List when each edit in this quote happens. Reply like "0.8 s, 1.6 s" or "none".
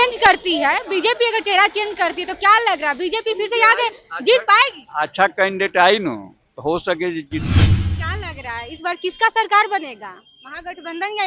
7.8 s